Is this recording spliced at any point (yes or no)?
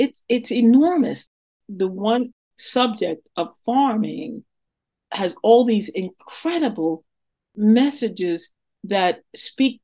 yes